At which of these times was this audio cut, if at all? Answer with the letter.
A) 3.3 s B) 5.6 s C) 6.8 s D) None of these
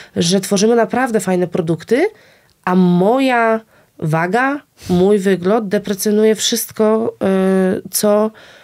D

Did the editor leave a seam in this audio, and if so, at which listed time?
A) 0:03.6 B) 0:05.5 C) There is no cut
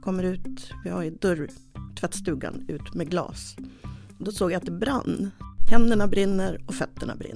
B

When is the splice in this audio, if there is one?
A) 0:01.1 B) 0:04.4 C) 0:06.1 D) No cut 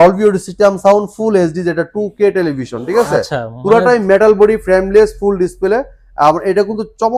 D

